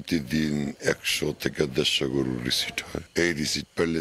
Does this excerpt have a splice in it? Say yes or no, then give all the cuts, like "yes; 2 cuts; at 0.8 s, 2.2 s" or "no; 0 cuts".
no; 0 cuts